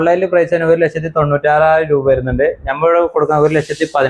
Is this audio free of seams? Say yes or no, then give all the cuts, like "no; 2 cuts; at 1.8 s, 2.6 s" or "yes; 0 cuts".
yes; 0 cuts